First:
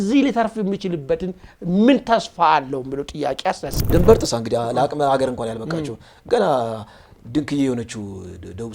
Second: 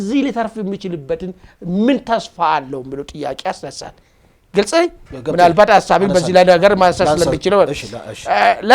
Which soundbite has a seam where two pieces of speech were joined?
first; 1 cut; at 3.7 s

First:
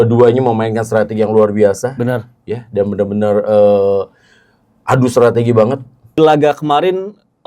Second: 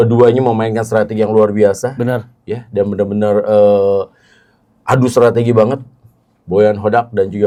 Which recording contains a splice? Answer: first; 1 cut; at 6.2 s

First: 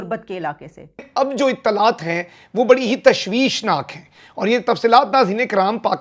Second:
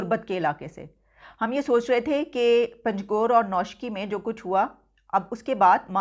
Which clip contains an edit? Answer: first; 1 cut; at 1.0 s

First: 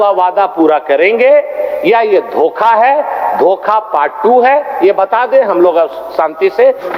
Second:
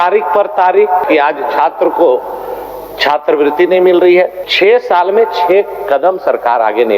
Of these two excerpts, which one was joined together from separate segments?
second; 2 cuts; at 1.0 s, 4.4 s

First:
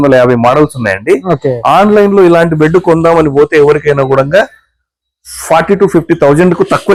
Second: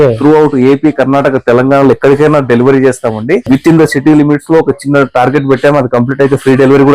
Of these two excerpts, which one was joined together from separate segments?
second; 1 cut; at 3.4 s

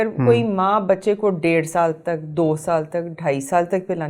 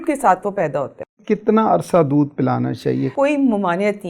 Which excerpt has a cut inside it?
second; 2 cuts; at 1.1 s, 3.1 s

